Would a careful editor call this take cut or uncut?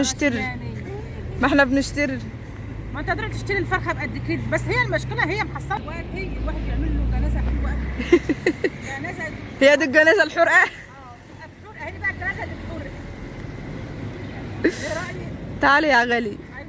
cut